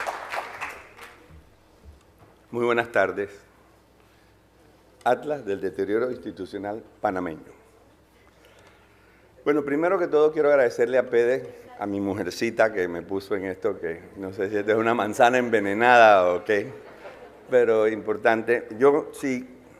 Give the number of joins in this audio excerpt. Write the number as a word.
one